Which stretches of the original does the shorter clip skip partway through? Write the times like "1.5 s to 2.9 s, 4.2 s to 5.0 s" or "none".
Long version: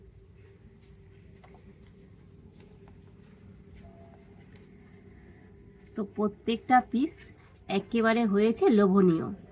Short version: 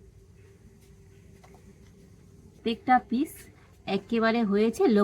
2.6 s to 6.4 s